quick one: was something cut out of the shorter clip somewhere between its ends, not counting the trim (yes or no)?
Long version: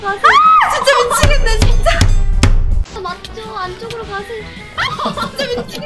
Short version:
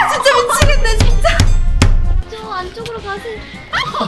yes